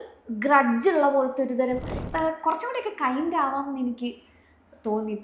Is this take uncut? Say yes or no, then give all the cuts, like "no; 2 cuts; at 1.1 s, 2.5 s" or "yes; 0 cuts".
no; 1 cut; at 1.9 s